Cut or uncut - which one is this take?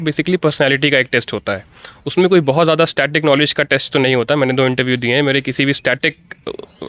uncut